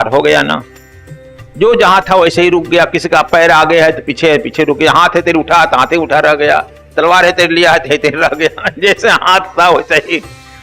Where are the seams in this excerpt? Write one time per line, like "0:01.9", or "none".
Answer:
none